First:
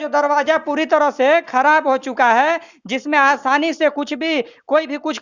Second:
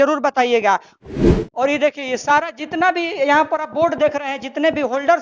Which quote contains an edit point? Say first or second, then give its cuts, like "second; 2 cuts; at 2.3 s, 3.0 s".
second; 1 cut; at 1.0 s